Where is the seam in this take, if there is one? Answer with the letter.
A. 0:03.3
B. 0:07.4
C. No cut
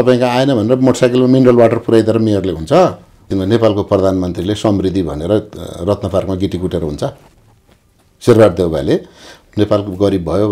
A